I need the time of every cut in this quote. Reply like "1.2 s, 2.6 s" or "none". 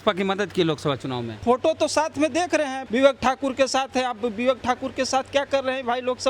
1.4 s, 2.8 s